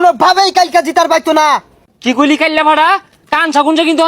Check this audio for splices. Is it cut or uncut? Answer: cut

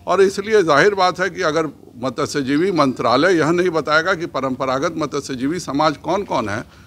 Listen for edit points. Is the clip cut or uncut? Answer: uncut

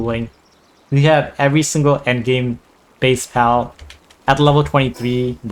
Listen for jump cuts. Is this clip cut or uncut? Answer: uncut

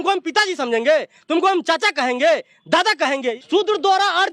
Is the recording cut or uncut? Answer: cut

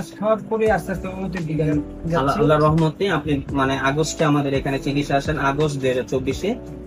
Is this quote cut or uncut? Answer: uncut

